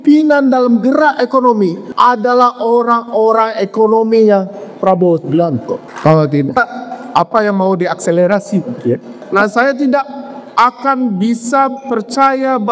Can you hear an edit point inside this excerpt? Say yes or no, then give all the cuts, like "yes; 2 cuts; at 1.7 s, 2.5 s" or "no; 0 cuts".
yes; 3 cuts; at 1.8 s, 5.9 s, 9.2 s